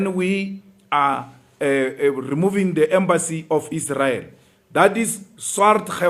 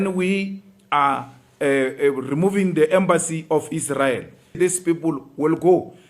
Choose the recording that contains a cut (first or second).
second